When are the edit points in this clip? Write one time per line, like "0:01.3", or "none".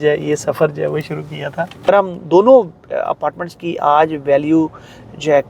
0:01.9